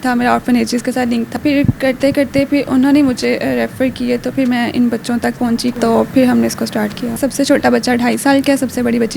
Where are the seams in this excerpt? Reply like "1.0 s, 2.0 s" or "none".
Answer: 1.4 s, 5.7 s, 7.2 s